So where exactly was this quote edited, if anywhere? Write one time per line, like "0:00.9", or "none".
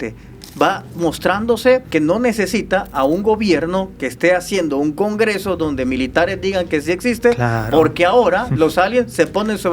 0:01.9

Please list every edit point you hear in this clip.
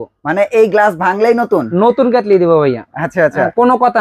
none

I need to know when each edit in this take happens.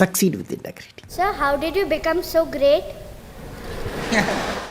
0:01.1

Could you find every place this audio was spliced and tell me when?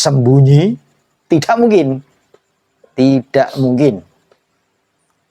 none

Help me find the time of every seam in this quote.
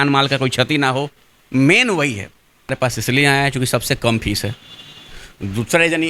0:02.7

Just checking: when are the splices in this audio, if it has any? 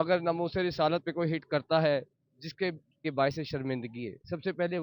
0:03.1

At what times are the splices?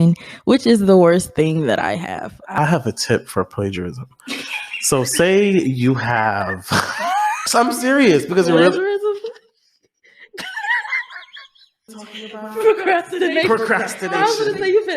0:02.5
0:07.4
0:11.9

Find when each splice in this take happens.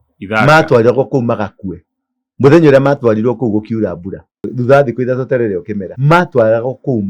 0:04.5
0:05.8

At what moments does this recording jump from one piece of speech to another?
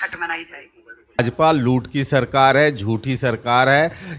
0:01.2

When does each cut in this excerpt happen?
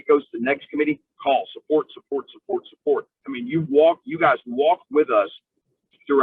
none

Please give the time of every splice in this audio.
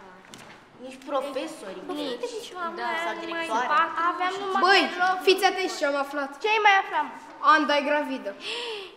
none

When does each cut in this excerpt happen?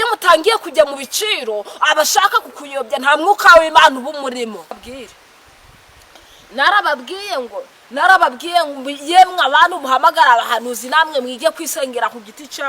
0:04.7

